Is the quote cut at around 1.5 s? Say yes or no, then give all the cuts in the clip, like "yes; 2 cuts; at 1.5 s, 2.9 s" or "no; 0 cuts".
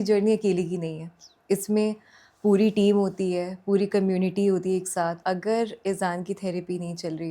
no; 1 cut; at 5.2 s